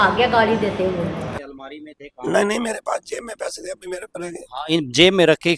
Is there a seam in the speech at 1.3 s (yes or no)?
yes